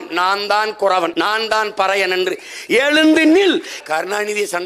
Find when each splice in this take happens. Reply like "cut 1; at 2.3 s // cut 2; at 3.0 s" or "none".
cut 1; at 1.1 s // cut 2; at 3.8 s